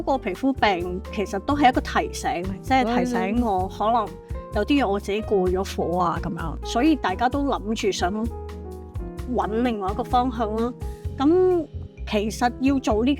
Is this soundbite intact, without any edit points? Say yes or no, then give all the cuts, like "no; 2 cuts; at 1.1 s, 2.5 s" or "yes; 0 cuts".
no; 1 cut; at 6.5 s